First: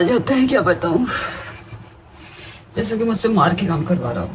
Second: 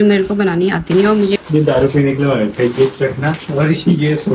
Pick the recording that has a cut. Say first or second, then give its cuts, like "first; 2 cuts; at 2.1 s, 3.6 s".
second; 1 cut; at 1.4 s